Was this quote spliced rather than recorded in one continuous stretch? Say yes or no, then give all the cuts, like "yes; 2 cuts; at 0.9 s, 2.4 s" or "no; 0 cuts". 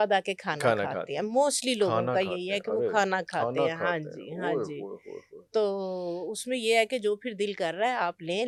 no; 0 cuts